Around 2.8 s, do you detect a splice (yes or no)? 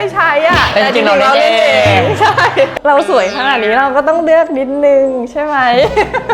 yes